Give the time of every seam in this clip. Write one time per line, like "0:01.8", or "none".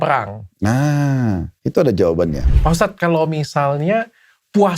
0:02.5